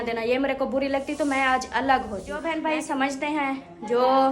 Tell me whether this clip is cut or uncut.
cut